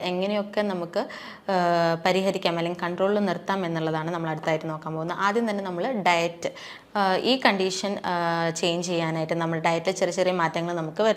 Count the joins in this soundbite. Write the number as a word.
zero